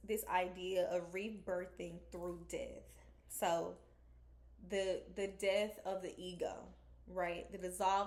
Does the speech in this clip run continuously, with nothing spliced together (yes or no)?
yes